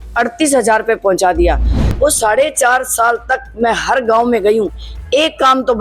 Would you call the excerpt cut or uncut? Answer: cut